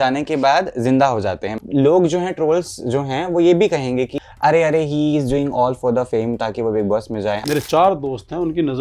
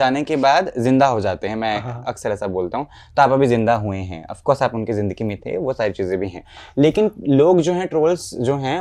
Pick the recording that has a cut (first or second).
first